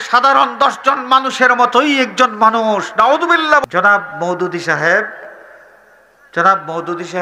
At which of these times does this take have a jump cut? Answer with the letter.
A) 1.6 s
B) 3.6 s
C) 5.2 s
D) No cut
B